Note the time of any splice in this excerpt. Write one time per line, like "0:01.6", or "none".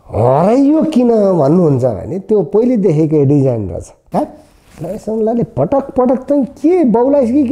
0:04.0